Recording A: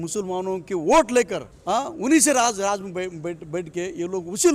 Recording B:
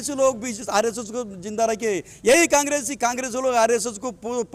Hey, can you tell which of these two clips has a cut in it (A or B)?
A